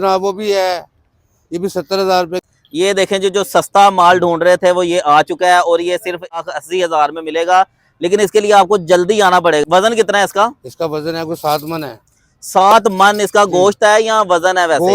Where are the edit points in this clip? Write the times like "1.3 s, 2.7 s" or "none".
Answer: 2.4 s, 6.4 s, 9.6 s